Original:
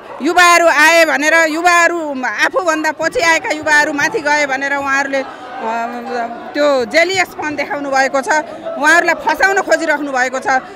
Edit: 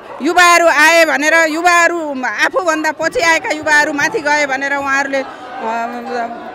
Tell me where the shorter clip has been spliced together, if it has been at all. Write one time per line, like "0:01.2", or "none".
none